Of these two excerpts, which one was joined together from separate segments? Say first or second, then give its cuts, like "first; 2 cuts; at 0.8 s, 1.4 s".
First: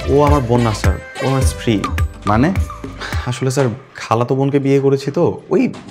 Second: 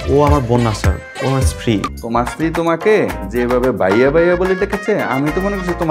second; 1 cut; at 2.0 s